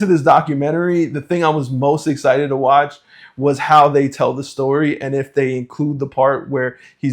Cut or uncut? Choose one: uncut